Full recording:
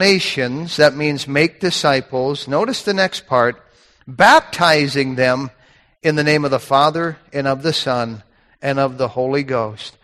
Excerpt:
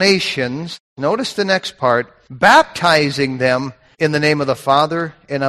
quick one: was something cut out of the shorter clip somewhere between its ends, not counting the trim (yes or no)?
yes